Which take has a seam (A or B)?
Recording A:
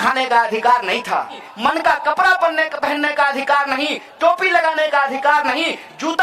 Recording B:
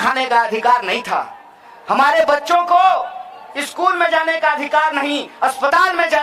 A